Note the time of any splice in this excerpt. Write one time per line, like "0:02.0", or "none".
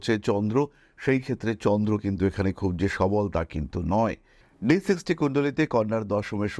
0:04.4

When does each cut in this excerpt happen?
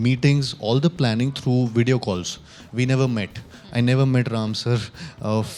none

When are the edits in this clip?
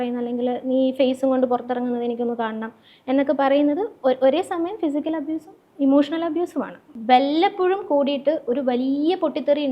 0:06.8

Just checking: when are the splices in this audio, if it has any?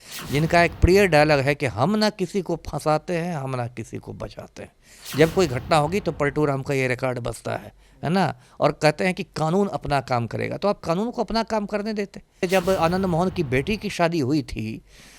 0:12.5

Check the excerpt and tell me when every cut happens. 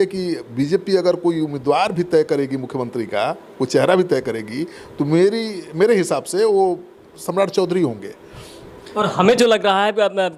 none

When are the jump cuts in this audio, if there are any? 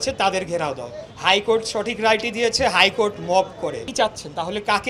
0:03.8

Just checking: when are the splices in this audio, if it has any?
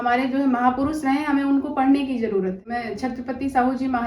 0:02.6

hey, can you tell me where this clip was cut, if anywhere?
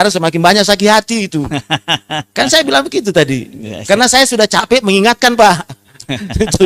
none

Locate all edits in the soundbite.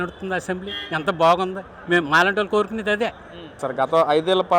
0:03.7

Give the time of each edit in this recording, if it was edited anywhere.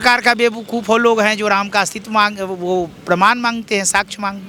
none

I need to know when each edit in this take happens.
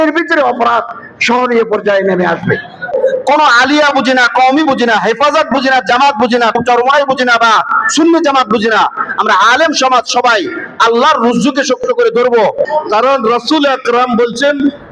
0:02.9
0:06.6
0:12.6

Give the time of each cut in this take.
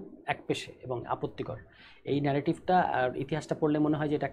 none

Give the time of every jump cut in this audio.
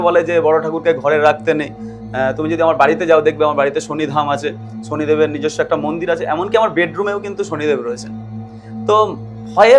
none

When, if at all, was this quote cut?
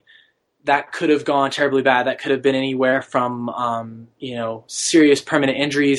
none

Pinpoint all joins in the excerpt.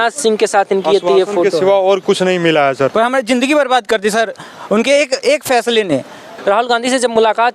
0:02.9
0:06.3

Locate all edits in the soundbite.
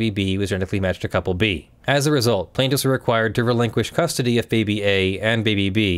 0:01.7

